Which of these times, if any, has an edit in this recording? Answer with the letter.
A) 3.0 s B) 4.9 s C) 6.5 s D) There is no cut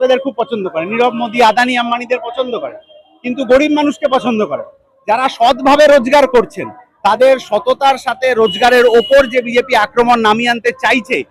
D